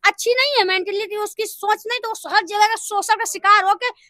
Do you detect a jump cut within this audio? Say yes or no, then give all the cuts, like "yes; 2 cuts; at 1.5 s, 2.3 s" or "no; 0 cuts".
no; 0 cuts